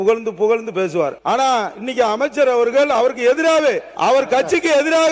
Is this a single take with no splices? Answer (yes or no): no